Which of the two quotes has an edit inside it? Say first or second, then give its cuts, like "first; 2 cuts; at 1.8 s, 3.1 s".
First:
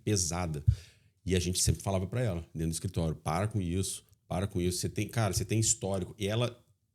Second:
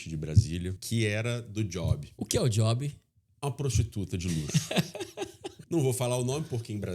second; 3 cuts; at 0.8 s, 2.1 s, 5.5 s